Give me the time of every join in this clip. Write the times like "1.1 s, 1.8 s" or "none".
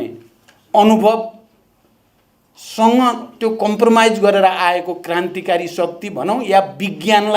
none